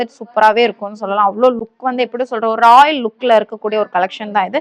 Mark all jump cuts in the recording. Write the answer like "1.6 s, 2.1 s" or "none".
none